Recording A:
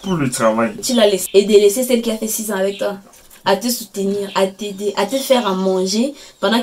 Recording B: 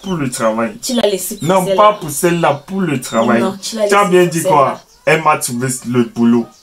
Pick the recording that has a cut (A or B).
A